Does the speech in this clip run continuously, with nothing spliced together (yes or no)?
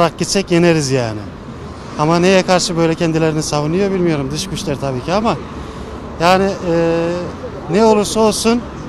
yes